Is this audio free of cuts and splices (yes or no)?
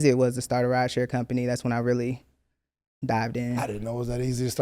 yes